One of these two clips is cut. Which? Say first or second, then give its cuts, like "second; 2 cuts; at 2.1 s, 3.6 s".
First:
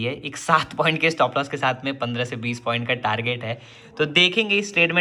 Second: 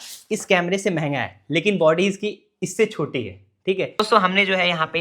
second; 1 cut; at 3.9 s